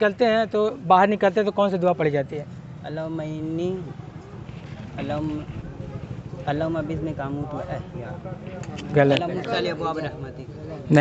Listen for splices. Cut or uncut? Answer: uncut